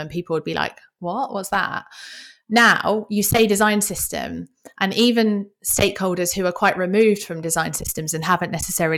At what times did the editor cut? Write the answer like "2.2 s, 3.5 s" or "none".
none